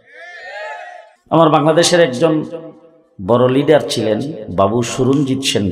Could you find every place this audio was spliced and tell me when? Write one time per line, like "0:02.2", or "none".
0:01.1